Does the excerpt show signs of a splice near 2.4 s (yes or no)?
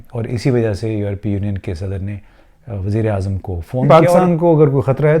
no